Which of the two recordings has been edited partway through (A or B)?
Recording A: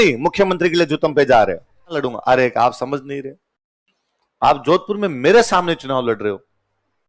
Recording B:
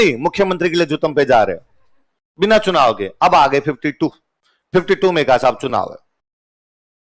A